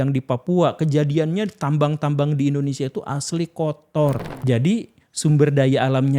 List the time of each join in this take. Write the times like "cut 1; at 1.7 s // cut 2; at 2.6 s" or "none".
cut 1; at 4.3 s